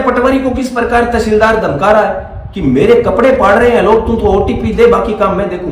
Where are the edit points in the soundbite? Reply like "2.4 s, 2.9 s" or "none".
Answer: none